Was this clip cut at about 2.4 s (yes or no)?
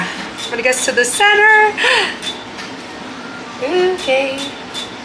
no